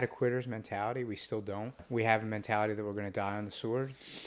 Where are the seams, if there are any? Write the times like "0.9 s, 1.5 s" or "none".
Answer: 1.8 s